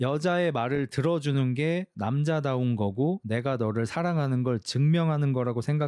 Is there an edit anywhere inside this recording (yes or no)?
no